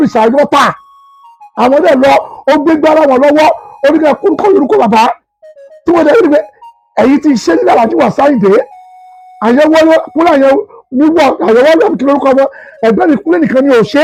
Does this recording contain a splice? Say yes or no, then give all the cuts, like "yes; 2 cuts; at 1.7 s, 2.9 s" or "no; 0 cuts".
no; 0 cuts